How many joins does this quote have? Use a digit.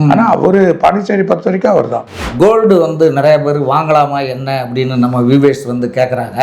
1